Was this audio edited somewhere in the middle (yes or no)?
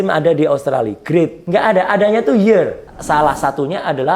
yes